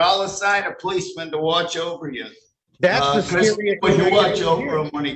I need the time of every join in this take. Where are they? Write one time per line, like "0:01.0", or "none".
none